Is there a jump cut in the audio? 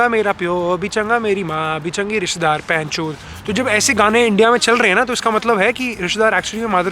no; 0 cuts

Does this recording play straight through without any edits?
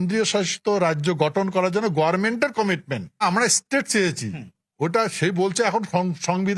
yes; 0 cuts

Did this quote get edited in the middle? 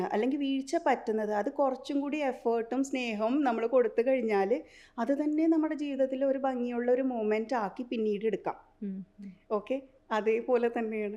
no; 0 cuts

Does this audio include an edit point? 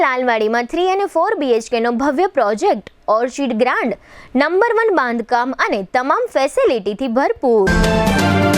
yes; 1 cut; at 7.7 s

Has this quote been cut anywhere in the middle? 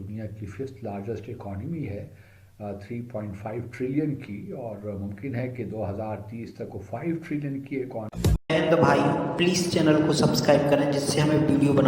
yes; 1 cut; at 8.4 s

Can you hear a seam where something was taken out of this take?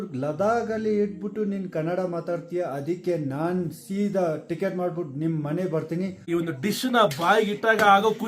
yes; 1 cut; at 6.2 s

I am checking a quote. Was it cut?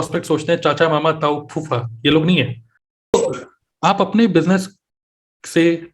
yes; 1 cut; at 3.1 s

